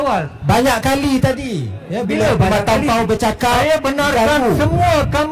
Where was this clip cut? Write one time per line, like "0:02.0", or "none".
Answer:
none

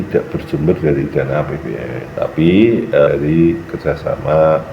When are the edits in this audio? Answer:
0:02.1
0:03.1

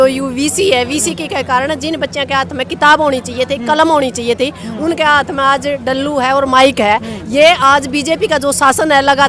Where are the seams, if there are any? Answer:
none

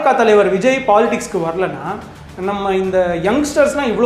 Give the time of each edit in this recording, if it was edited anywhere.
none

